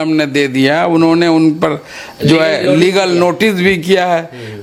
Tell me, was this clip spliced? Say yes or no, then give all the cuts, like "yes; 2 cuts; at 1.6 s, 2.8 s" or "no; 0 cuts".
no; 0 cuts